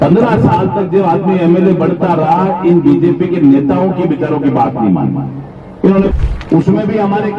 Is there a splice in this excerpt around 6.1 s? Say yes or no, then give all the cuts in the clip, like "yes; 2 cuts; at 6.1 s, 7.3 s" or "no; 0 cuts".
yes; 1 cut; at 6.1 s